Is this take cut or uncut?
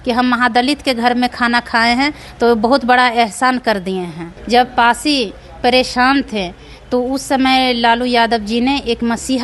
cut